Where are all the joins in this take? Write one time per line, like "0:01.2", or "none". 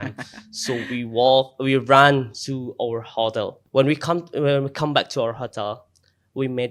0:03.6